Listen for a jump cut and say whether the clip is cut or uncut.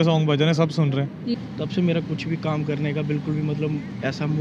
cut